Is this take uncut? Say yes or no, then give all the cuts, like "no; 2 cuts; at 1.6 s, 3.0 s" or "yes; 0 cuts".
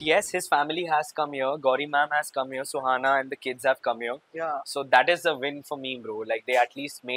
yes; 0 cuts